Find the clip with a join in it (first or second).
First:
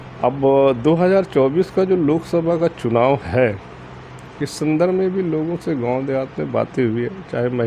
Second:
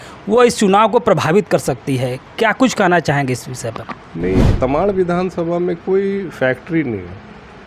second